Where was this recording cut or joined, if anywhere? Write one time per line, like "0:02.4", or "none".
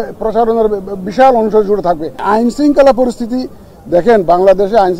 0:02.2